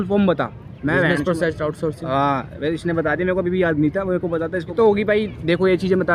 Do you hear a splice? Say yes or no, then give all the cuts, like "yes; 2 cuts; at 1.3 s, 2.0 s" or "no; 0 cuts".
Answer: no; 0 cuts